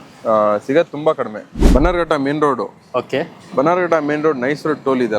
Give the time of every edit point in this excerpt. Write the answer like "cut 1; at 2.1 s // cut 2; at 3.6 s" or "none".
cut 1; at 1.6 s